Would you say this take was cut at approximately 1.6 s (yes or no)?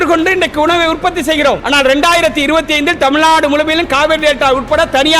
yes